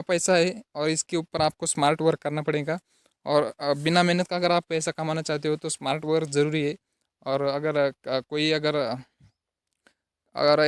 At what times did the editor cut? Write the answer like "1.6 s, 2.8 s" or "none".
none